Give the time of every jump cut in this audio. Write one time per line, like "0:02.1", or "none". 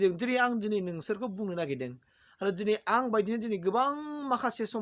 none